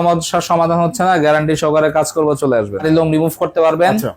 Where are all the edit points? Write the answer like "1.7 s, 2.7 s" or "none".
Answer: 2.9 s